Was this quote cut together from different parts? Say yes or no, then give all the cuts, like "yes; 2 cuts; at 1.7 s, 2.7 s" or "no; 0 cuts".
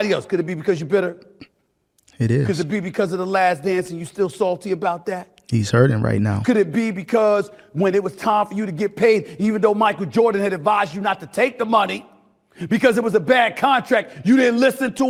no; 0 cuts